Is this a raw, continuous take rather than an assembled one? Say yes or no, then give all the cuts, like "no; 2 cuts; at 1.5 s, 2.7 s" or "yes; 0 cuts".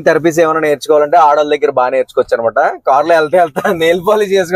yes; 0 cuts